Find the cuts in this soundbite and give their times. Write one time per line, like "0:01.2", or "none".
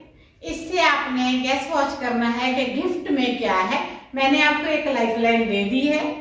none